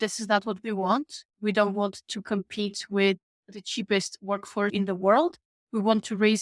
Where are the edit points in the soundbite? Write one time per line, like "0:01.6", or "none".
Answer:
0:04.7